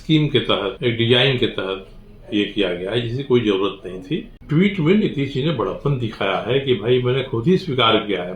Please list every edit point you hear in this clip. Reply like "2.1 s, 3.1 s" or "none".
0.8 s, 4.3 s